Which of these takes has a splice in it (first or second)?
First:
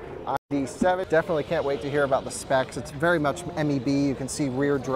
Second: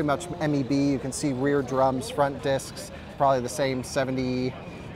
first